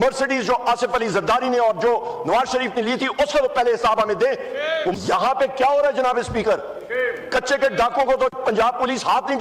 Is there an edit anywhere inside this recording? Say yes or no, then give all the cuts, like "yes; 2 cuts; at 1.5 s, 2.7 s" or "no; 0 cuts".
yes; 1 cut; at 4.9 s